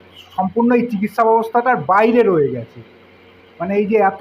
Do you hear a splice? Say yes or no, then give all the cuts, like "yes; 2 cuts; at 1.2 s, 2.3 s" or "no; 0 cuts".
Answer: no; 0 cuts